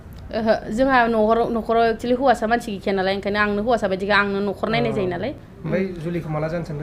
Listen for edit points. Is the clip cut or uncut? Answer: cut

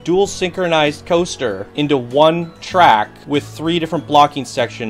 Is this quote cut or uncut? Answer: cut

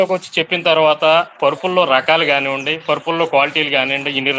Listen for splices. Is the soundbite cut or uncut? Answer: uncut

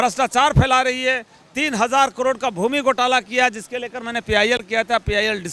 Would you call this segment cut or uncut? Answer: uncut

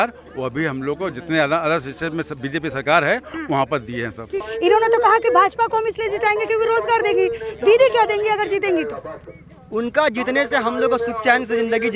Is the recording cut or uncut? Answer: cut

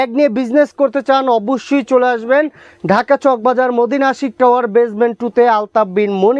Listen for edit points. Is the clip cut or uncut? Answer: uncut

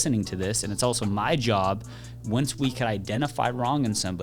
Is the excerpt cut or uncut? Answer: cut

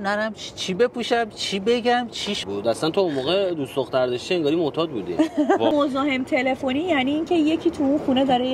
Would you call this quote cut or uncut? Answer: cut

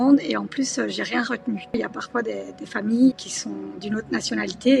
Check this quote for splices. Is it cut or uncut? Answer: cut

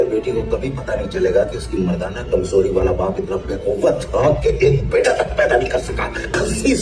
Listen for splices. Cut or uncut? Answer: uncut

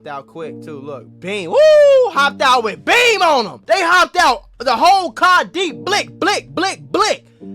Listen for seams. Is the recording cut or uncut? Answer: cut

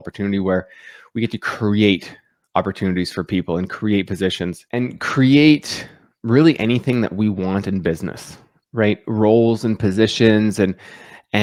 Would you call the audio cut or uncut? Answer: uncut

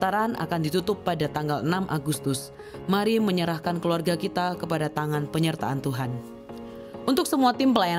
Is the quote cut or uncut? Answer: cut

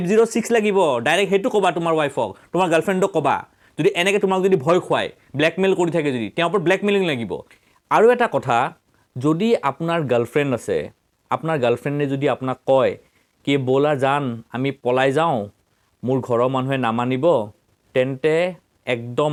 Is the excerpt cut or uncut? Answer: uncut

